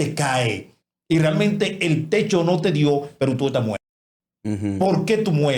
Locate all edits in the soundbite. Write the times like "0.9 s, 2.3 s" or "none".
none